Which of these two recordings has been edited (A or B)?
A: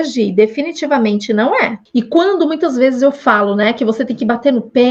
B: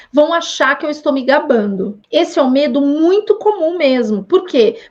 A